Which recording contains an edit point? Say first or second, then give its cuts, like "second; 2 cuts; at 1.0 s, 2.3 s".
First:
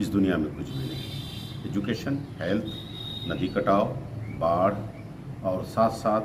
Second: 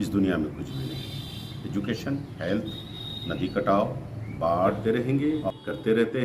second; 1 cut; at 4.8 s